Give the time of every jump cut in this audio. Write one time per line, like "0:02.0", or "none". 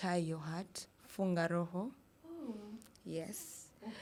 none